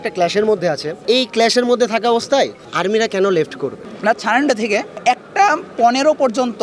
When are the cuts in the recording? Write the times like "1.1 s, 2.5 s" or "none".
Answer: 1.0 s, 3.9 s